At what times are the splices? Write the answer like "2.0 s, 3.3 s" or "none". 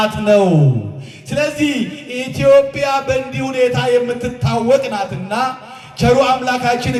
none